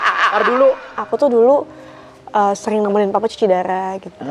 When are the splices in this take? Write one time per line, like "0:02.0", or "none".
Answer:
0:01.0